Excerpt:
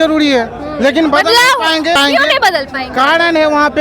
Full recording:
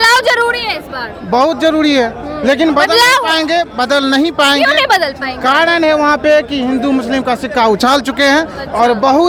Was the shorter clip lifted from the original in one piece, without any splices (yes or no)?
no